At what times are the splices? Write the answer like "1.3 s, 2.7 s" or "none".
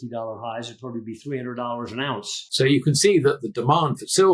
2.5 s